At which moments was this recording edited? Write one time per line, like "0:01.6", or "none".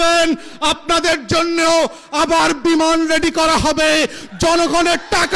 none